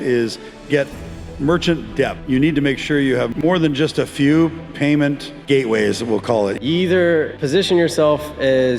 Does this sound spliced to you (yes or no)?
yes